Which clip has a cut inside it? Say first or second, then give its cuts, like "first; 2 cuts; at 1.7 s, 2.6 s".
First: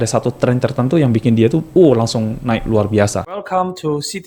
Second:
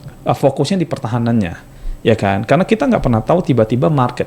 first; 1 cut; at 3.1 s